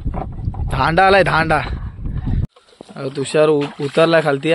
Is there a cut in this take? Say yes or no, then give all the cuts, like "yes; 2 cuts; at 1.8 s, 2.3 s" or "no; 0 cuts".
yes; 1 cut; at 2.5 s